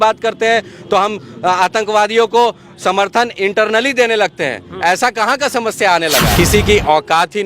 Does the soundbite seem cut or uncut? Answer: cut